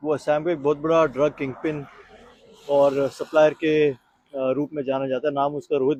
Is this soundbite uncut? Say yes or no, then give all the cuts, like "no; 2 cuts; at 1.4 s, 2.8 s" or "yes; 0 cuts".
yes; 0 cuts